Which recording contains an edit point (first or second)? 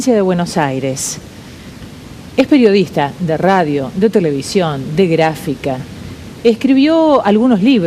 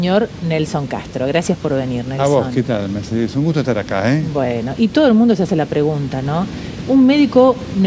second